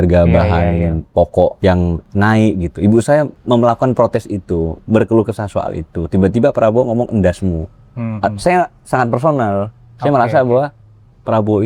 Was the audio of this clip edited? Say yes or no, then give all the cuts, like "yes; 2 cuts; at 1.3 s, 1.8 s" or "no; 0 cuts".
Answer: no; 0 cuts